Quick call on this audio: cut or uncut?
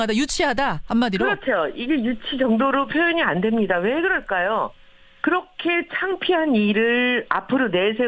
uncut